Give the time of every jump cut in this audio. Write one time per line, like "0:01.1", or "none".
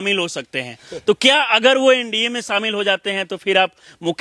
none